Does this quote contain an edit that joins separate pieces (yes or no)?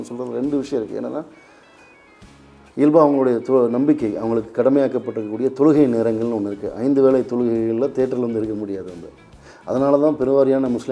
no